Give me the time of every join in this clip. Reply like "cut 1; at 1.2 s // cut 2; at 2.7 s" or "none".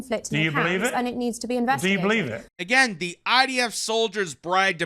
cut 1; at 2.4 s